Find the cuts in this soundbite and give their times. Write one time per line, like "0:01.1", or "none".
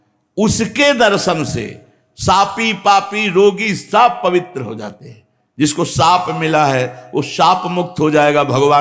none